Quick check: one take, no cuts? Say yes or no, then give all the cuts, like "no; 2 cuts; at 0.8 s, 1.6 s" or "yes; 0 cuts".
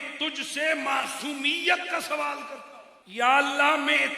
no; 1 cut; at 2.8 s